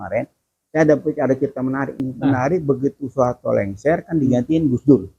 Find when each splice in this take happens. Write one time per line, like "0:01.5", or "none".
0:02.0